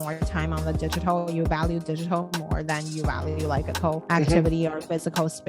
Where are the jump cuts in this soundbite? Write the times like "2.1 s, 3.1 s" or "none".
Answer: 3.7 s